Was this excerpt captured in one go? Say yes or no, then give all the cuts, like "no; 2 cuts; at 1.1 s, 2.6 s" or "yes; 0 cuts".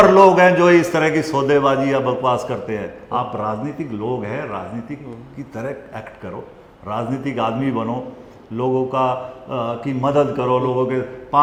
yes; 0 cuts